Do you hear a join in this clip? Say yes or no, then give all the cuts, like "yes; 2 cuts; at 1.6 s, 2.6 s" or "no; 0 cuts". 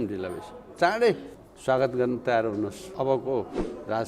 yes; 2 cuts; at 1.3 s, 2.9 s